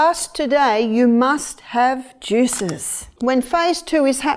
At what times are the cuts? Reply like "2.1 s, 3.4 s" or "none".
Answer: 3.1 s